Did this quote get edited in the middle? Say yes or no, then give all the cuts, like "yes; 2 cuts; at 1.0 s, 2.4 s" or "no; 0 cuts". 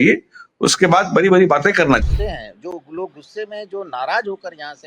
yes; 1 cut; at 2.0 s